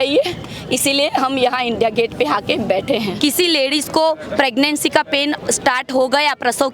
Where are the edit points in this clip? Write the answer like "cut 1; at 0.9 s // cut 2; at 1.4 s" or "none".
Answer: cut 1; at 3.1 s